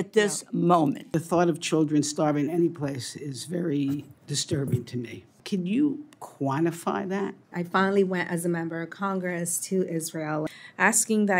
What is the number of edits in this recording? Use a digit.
4